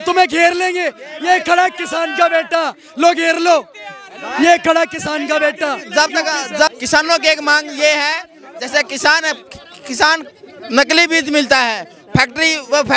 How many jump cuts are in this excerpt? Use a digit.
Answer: 0